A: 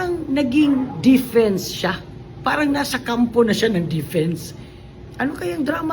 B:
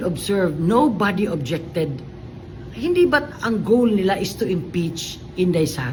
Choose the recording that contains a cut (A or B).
A